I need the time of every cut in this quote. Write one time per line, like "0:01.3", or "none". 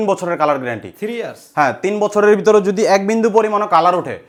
none